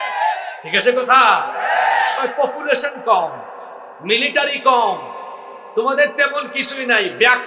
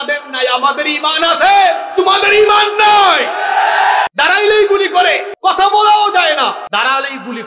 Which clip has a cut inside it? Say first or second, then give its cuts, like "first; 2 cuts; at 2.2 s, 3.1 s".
second; 3 cuts; at 4.1 s, 5.3 s, 6.6 s